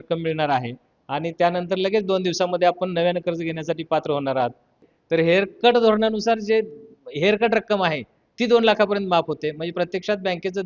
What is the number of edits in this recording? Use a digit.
1